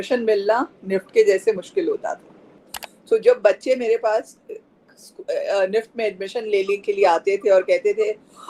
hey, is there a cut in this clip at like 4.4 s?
no; 1 cut; at 2.6 s

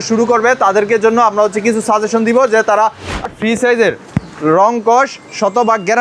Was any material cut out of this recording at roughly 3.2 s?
yes; 1 cut; at 3.2 s

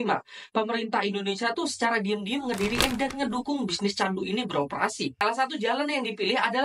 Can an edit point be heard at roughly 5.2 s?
yes; 1 cut; at 5.2 s

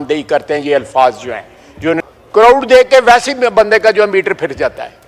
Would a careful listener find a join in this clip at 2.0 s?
yes; 1 cut; at 2.0 s

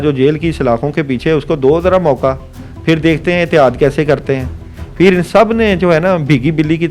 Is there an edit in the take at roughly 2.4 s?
no; 0 cuts

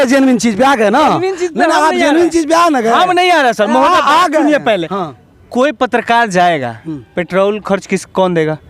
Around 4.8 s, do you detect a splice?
no; 0 cuts

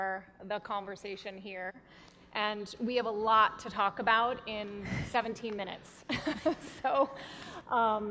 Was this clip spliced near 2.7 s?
no; 1 cut; at 5.3 s

